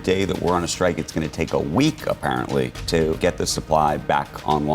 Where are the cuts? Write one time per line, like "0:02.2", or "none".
0:03.2